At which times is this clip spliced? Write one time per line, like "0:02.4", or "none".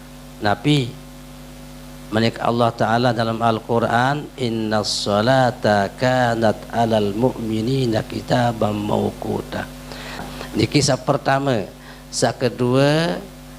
0:10.3